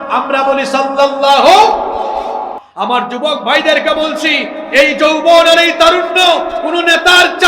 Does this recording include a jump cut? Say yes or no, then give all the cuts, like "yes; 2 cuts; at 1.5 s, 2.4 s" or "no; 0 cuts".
yes; 1 cut; at 2.6 s